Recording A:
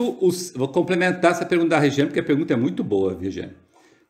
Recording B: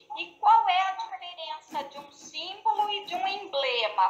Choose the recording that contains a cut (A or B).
A